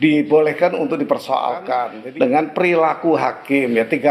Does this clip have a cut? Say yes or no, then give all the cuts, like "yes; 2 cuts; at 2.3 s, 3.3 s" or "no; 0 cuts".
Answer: yes; 1 cut; at 2.0 s